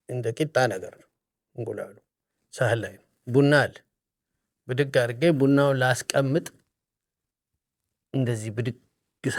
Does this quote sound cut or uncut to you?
uncut